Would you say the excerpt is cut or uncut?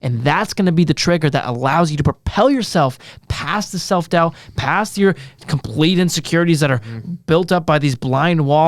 uncut